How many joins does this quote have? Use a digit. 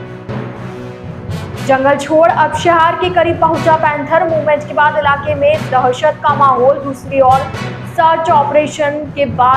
1